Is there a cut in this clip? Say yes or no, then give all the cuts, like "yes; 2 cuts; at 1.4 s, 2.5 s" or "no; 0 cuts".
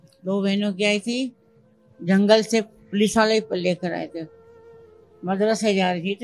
no; 0 cuts